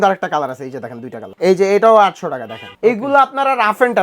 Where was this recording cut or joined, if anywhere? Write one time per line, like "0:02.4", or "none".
0:01.2
0:02.6

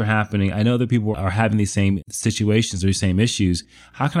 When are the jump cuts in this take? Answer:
0:01.1

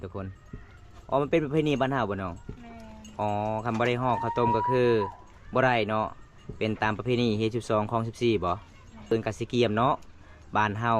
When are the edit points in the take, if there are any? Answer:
0:09.1

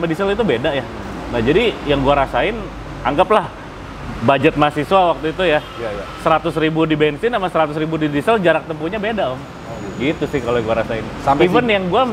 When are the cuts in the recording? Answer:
none

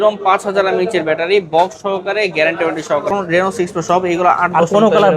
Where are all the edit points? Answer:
0:03.1

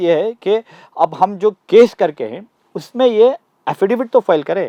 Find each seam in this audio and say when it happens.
none

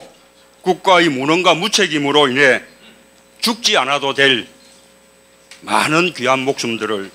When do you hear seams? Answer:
0:06.0

